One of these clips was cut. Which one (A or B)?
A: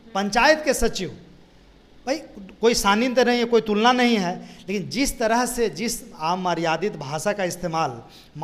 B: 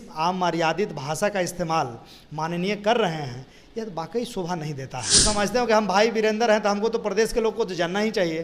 B